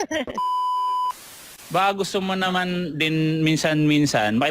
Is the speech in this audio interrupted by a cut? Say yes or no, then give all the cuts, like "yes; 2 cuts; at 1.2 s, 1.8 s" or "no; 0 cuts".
yes; 1 cut; at 1.6 s